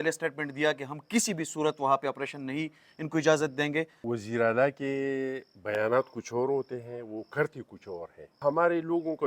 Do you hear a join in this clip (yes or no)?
yes